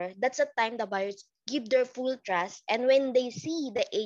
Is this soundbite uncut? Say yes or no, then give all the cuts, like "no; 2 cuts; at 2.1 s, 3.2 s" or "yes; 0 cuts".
yes; 0 cuts